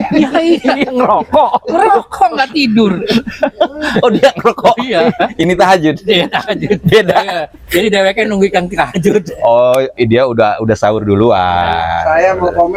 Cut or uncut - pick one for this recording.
uncut